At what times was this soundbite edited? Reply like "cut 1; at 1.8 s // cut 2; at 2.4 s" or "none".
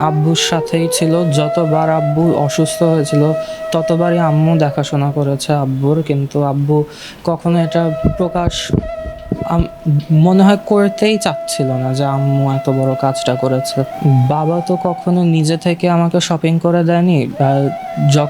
cut 1; at 13.9 s